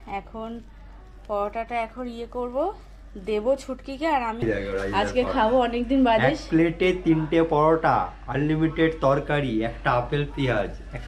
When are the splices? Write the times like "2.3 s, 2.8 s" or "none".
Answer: 4.4 s